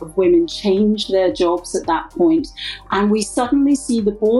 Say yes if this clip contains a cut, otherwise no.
yes